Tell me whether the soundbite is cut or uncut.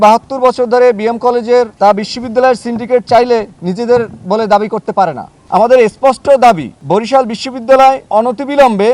cut